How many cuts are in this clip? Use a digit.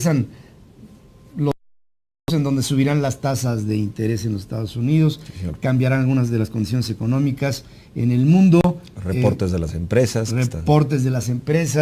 1